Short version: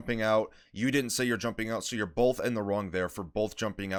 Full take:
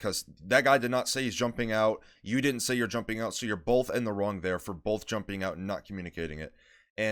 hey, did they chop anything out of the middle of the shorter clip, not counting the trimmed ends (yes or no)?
no